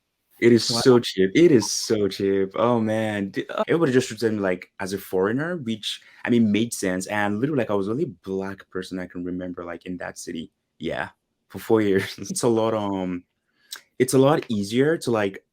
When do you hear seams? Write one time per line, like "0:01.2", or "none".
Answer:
0:03.6
0:12.4